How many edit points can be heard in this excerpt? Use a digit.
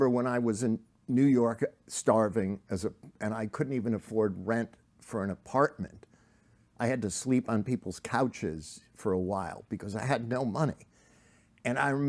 1